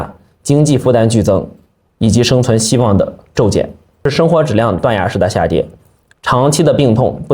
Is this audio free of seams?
no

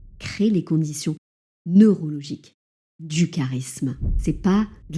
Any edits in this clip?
yes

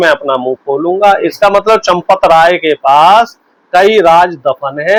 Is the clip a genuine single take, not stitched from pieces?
yes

